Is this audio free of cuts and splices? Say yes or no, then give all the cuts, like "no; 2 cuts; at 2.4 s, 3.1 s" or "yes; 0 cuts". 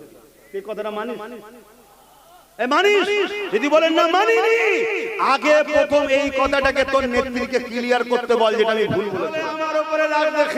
no; 1 cut; at 9.5 s